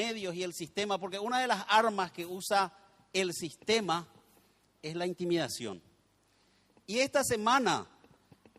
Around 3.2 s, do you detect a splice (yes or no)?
yes